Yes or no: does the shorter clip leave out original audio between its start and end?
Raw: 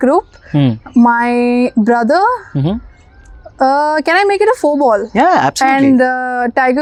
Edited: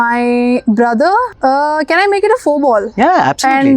yes